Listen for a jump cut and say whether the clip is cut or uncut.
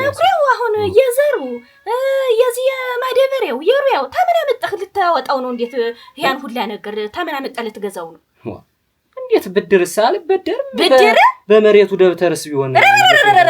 uncut